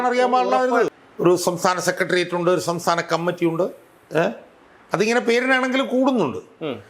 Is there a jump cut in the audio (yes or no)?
yes